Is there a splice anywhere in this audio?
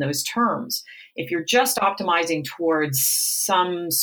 no; 0 cuts

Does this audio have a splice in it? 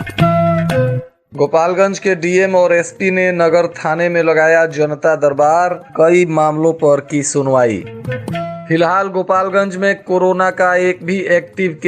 yes; 1 cut; at 0.9 s

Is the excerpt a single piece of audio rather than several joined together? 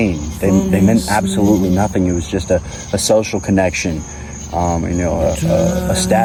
yes; 0 cuts

